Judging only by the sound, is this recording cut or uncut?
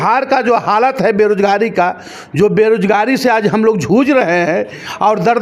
uncut